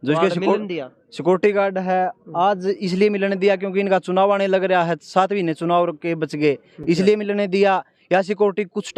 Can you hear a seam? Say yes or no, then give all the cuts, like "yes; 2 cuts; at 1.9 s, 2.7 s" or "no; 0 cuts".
no; 0 cuts